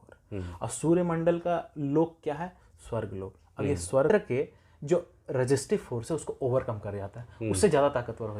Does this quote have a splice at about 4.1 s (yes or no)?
yes